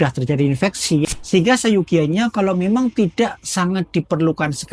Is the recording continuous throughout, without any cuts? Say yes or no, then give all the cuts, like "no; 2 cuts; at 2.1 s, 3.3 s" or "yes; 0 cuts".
no; 1 cut; at 1.1 s